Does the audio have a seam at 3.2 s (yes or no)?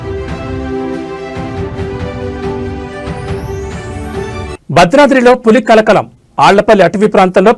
yes